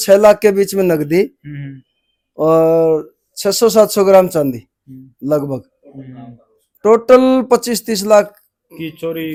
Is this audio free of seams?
yes; 0 cuts

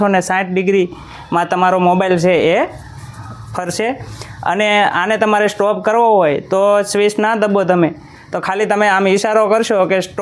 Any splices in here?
no; 0 cuts

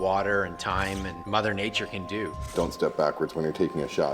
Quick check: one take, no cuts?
no; 2 cuts; at 1.2 s, 2.5 s

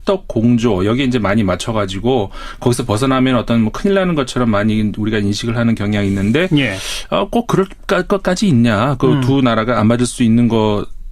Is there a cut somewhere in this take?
yes; 1 cut; at 7.2 s

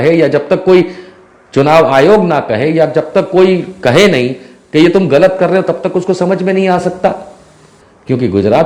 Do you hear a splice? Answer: yes; 1 cut; at 7.6 s

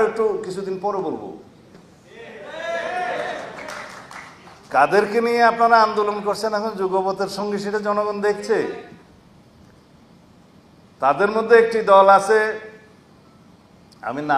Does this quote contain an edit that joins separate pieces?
no; 0 cuts

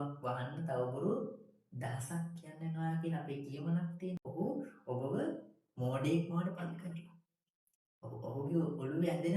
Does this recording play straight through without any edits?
no; 1 cut; at 4.3 s

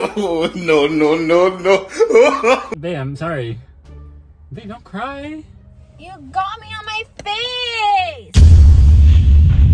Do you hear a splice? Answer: no; 0 cuts

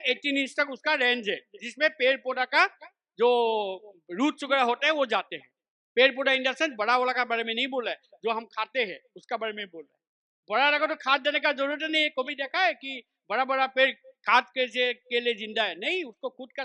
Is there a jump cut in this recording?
no; 0 cuts

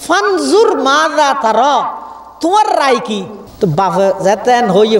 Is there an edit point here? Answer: yes; 1 cut; at 3.4 s

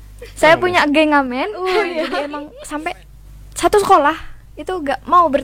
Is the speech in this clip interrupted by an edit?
yes; 1 cut; at 2.1 s

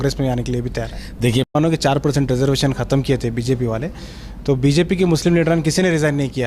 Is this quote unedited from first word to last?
no; 1 cut; at 1.5 s

